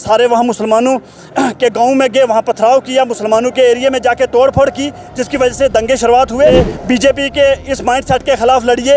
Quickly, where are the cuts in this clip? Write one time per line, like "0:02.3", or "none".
0:06.5